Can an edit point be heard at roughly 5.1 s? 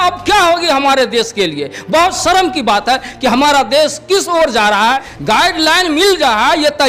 yes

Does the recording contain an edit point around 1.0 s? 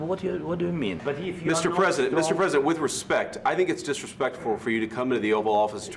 yes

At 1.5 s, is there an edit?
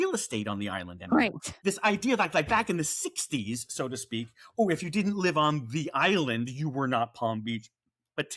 yes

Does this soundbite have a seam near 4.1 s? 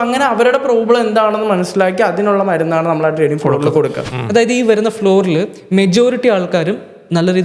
yes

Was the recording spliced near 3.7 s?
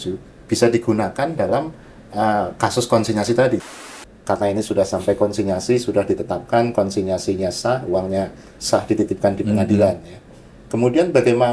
yes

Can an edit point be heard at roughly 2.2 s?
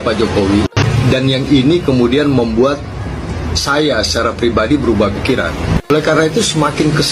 no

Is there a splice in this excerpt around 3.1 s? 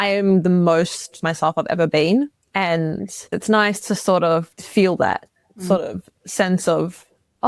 yes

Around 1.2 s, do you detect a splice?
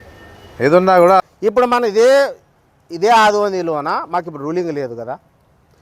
yes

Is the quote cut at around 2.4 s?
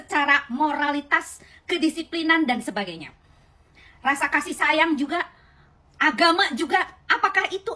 no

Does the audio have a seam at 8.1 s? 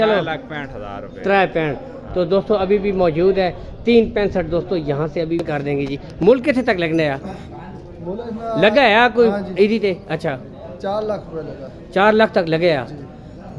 no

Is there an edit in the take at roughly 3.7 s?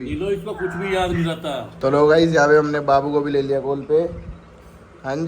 no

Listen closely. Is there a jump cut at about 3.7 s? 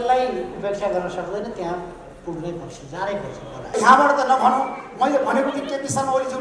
yes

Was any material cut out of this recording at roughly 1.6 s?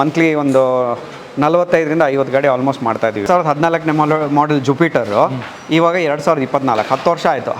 no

